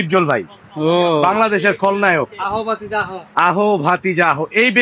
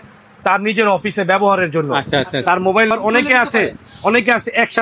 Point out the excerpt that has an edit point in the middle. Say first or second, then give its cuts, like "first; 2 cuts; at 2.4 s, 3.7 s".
second; 1 cut; at 2.9 s